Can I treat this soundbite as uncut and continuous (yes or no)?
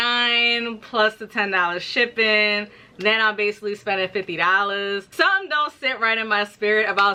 yes